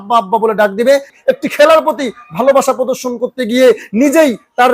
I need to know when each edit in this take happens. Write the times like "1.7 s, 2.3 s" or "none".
1.1 s